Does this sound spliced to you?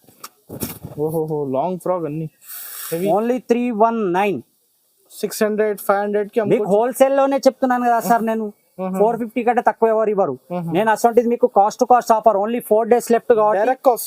no; 0 cuts

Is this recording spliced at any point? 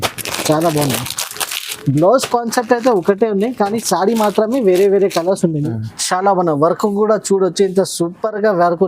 yes; 1 cut; at 5.7 s

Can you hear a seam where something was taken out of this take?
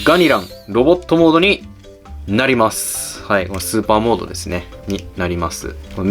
no; 0 cuts

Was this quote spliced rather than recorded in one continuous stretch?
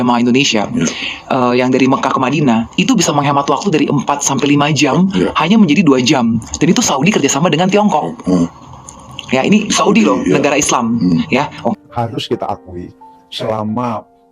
yes; 1 cut; at 11.7 s

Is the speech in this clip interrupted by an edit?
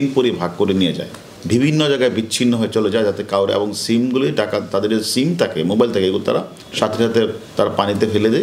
no; 0 cuts

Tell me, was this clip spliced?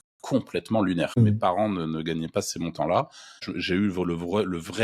yes; 2 cuts; at 1.4 s, 3.5 s

